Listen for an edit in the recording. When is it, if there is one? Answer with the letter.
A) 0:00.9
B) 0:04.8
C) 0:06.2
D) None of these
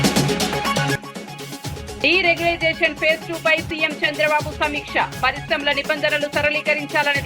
A